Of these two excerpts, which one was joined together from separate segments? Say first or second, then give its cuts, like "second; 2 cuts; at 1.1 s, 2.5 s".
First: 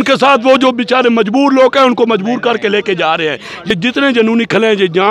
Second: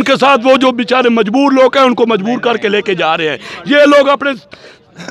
first; 1 cut; at 3.7 s